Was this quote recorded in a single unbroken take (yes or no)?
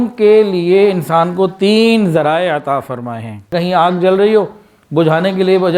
no